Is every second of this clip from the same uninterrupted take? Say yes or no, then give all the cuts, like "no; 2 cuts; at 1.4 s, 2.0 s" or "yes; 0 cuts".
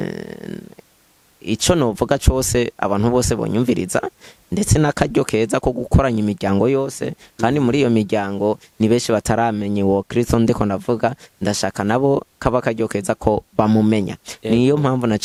yes; 0 cuts